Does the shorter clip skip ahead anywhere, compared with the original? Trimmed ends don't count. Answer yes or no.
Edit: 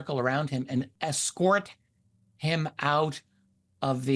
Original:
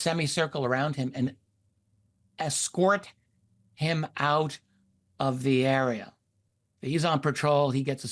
yes